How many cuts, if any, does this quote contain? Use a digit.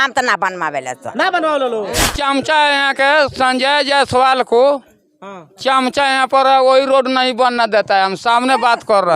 1